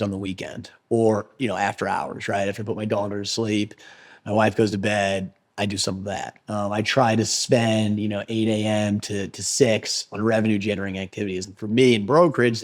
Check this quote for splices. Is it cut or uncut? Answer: cut